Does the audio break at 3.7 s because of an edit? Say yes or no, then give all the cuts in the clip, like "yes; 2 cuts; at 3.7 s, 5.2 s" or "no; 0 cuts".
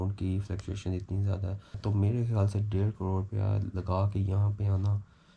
no; 1 cut; at 1.8 s